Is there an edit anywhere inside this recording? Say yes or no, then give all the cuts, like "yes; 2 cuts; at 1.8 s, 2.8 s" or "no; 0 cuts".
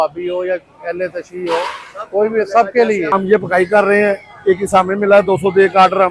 yes; 1 cut; at 3.1 s